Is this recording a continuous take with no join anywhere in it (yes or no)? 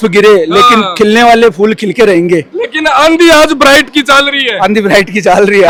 yes